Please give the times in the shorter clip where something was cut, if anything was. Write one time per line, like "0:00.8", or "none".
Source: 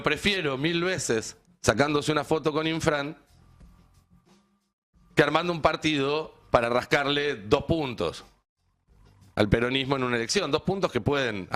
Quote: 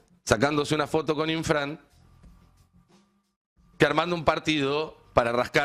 none